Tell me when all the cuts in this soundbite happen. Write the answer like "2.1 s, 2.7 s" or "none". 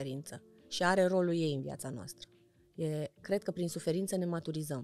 none